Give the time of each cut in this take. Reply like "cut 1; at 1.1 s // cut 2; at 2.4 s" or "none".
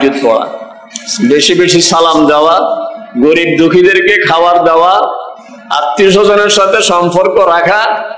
none